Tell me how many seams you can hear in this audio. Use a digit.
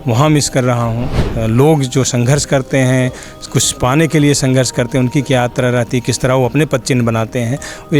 1